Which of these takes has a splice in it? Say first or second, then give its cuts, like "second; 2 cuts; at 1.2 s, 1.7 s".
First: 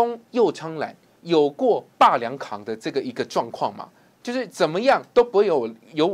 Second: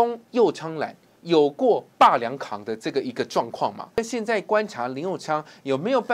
second; 1 cut; at 4.0 s